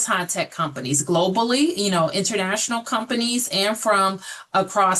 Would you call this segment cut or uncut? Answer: uncut